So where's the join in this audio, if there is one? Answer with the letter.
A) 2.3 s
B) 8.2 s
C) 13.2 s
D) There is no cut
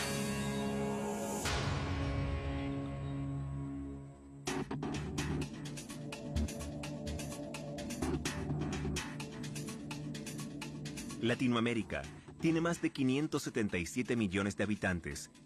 B